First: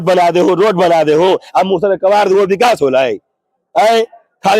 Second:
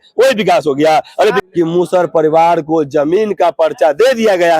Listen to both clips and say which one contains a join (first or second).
second